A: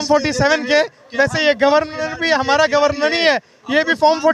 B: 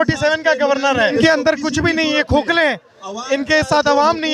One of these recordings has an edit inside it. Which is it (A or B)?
B